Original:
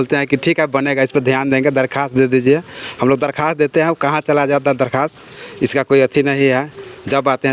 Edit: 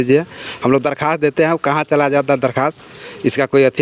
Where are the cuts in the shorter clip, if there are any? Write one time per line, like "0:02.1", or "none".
none